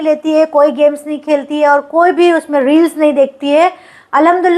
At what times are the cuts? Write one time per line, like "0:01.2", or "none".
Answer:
none